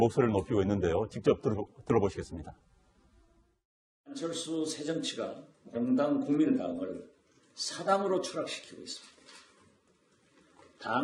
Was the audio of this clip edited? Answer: no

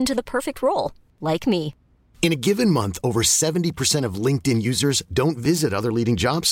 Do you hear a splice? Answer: no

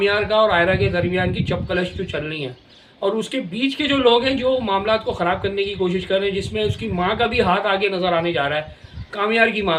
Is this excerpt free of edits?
yes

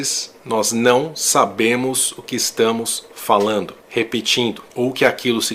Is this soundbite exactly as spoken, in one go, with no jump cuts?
no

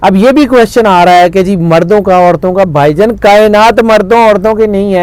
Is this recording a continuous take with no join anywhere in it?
yes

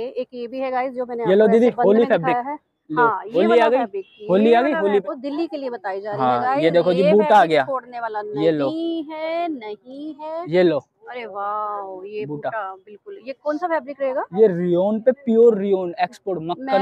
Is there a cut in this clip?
yes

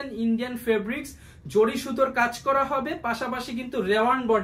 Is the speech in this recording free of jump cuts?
yes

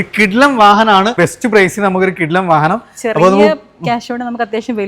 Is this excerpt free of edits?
no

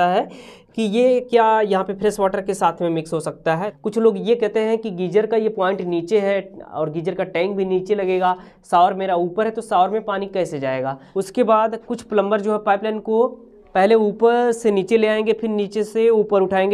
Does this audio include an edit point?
yes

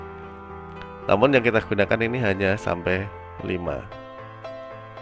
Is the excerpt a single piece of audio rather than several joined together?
no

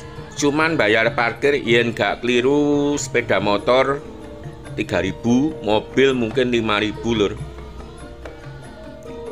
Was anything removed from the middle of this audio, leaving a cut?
no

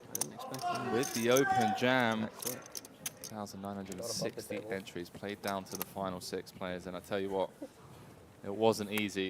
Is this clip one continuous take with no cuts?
no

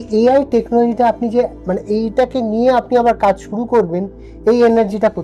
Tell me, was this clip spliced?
no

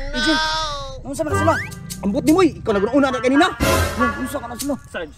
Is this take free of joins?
yes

